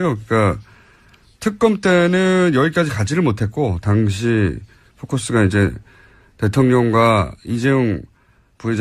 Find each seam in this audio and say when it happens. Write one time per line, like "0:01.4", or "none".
0:02.8